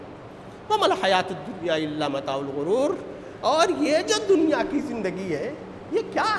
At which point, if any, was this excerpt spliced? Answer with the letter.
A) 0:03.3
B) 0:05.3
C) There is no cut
C